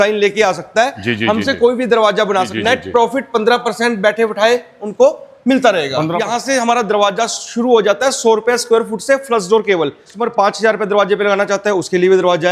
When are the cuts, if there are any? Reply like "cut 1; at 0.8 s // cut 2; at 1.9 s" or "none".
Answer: cut 1; at 2.5 s // cut 2; at 6.2 s // cut 3; at 10.2 s